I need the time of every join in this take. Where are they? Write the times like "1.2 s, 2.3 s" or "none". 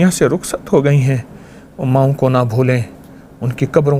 none

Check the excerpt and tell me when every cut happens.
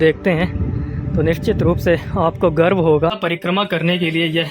3.2 s

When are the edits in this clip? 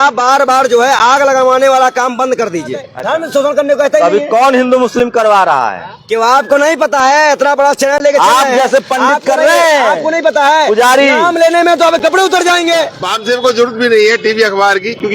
2.9 s, 13.1 s

